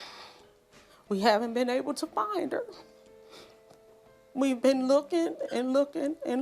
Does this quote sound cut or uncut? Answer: uncut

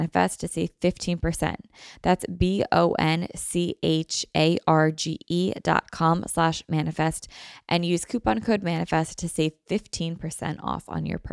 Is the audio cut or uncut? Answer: uncut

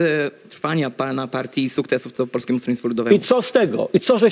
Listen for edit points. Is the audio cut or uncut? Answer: uncut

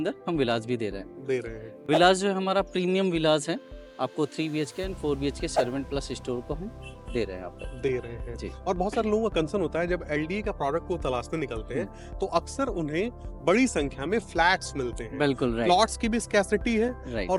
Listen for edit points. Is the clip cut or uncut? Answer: uncut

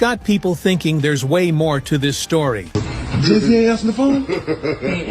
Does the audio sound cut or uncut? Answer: cut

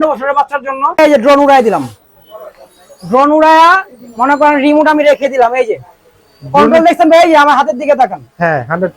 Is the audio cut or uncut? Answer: cut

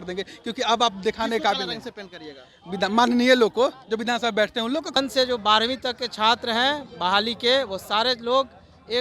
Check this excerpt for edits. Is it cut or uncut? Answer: cut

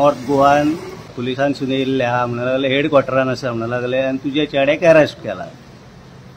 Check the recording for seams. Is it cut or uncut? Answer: cut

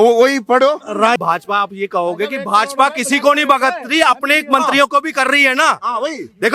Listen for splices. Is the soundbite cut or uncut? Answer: cut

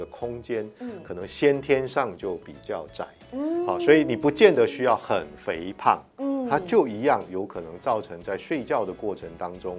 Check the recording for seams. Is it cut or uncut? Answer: uncut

